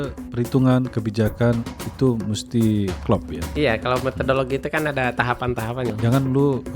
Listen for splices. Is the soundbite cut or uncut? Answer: cut